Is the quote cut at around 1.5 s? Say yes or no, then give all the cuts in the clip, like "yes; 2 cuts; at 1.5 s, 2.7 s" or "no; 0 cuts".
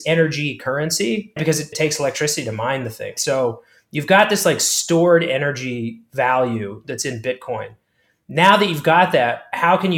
yes; 2 cuts; at 1.5 s, 3.2 s